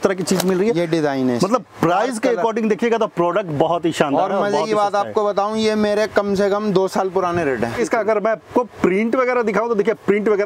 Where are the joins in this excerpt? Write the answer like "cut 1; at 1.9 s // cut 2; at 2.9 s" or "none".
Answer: cut 1; at 7.8 s